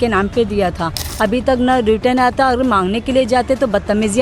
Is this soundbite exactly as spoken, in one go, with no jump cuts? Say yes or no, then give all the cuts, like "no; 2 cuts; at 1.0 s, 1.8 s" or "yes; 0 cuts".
yes; 0 cuts